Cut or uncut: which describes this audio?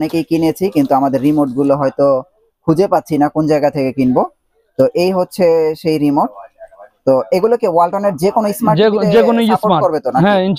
uncut